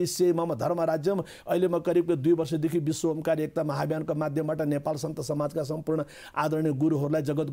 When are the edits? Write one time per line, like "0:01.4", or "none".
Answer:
none